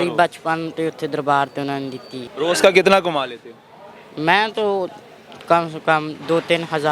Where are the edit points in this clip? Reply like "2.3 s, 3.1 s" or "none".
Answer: 2.2 s

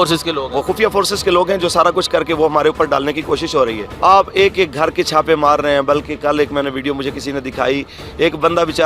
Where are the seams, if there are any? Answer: 3.8 s

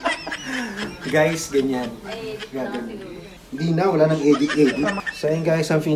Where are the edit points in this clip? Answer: 3.3 s, 5.1 s

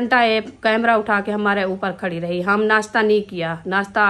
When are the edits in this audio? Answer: none

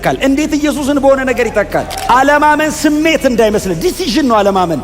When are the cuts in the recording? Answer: 1.9 s

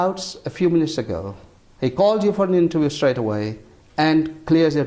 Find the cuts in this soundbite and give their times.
none

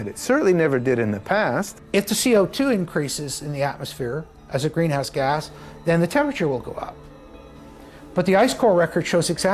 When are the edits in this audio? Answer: 1.8 s

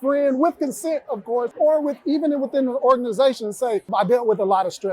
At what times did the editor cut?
1.5 s, 3.9 s

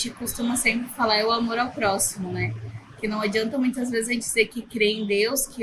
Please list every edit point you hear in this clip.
none

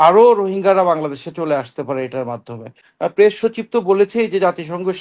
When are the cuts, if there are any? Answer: 2.8 s

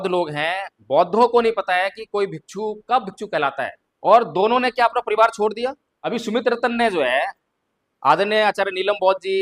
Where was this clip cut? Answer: 3.8 s, 5.9 s

